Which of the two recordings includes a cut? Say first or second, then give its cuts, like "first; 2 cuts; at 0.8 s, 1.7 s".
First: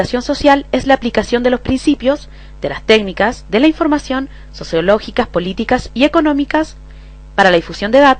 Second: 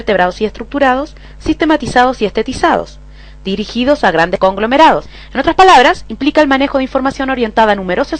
first; 1 cut; at 4.6 s